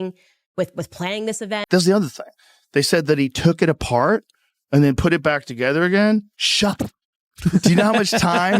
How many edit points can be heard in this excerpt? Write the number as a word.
one